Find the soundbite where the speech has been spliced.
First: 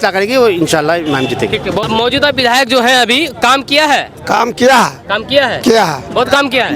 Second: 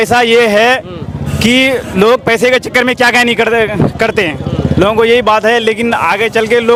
first; 1 cut; at 1.8 s

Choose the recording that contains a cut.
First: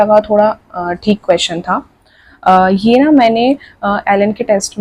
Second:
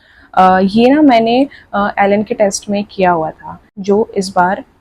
second; 1 cut; at 3.7 s

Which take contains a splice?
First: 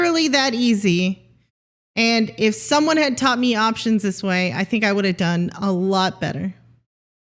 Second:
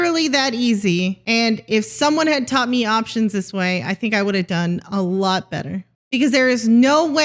second; 2 cuts; at 1.2 s, 5.9 s

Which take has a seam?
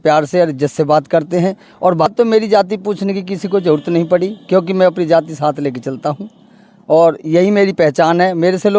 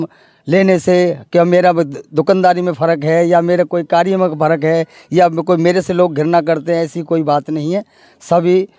first; 1 cut; at 2.1 s

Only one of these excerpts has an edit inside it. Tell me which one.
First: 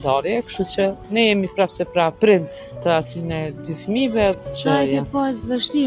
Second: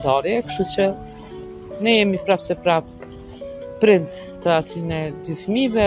first; 3 cuts; at 1.0 s, 2.1 s, 4.4 s

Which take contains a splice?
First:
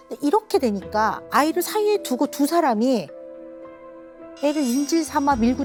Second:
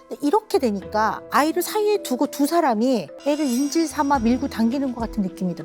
second; 1 cut; at 3.1 s

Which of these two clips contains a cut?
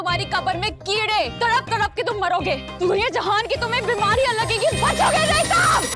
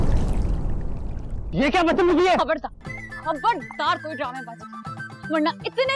second; 1 cut; at 1.3 s

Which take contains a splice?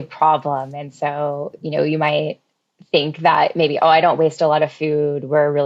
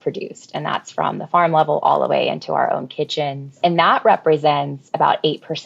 second; 1 cut; at 3.6 s

